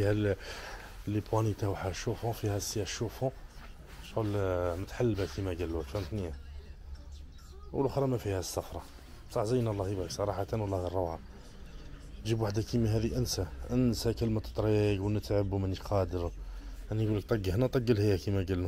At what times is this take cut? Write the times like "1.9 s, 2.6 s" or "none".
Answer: none